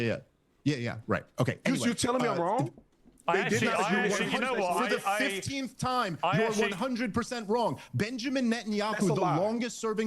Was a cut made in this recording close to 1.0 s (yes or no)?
yes